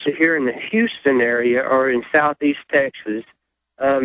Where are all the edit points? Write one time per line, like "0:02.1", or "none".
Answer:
0:01.0